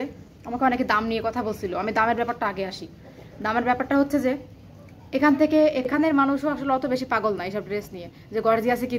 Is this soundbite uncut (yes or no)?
no